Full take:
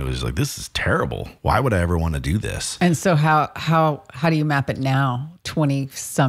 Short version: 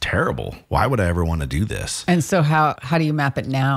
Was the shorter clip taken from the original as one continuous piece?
no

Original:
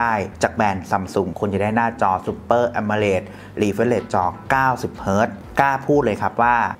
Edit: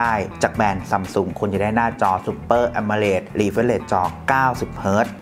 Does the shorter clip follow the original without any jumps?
no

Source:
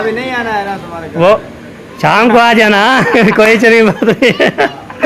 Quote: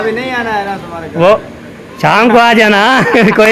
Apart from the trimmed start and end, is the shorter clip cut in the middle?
no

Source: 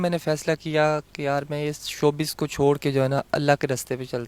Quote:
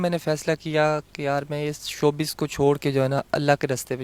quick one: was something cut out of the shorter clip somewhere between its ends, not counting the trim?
no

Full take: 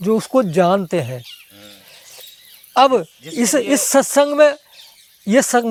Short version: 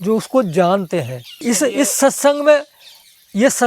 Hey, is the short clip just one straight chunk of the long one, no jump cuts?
no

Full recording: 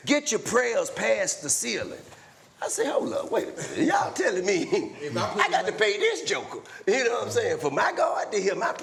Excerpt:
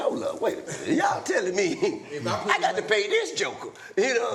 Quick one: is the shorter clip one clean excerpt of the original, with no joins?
yes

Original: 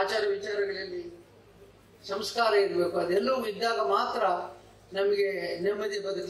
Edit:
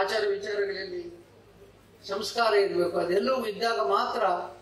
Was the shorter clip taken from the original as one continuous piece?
yes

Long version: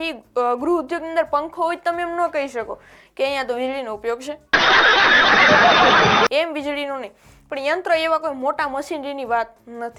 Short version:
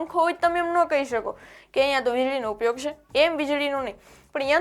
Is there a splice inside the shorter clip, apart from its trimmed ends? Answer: yes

